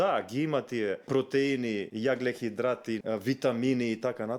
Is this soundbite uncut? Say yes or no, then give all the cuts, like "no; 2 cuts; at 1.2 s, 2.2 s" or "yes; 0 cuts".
no; 3 cuts; at 1.0 s, 1.9 s, 3.0 s